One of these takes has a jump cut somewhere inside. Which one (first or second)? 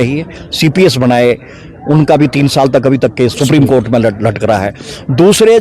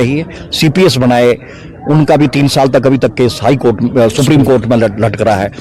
first